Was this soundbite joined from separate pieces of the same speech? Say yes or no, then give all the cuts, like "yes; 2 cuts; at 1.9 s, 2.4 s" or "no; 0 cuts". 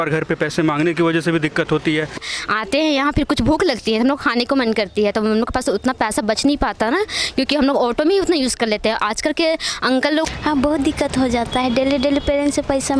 yes; 2 cuts; at 2.2 s, 10.2 s